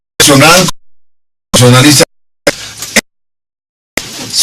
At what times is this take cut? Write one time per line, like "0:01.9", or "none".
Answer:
0:02.2